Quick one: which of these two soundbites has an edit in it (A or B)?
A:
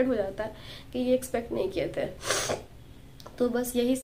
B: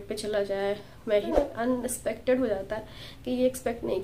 B